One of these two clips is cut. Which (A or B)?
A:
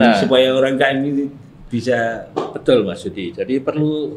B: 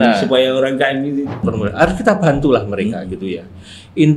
B